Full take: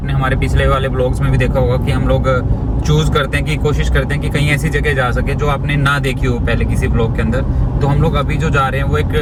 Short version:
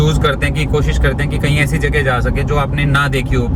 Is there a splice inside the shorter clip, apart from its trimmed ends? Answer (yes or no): no